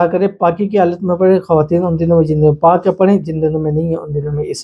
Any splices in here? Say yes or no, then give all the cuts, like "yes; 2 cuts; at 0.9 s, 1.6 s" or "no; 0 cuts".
no; 0 cuts